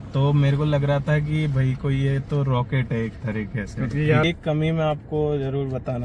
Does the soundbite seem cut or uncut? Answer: cut